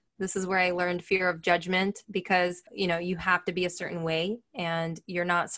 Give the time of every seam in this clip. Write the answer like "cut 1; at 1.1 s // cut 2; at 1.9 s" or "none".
cut 1; at 2.7 s